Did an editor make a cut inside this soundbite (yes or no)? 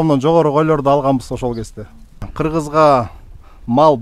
yes